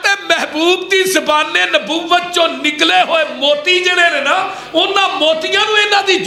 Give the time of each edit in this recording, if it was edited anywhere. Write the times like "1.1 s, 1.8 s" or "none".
none